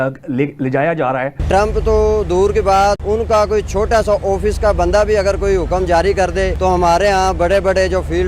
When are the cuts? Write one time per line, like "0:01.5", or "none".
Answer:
0:01.4
0:03.0
0:06.5